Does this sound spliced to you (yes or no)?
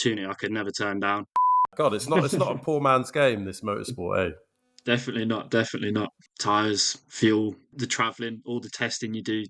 yes